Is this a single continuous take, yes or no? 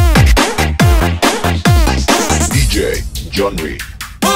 no